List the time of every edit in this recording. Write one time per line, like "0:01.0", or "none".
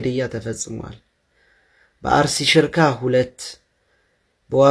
none